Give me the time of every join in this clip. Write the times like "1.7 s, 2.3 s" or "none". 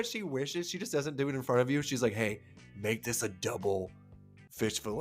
none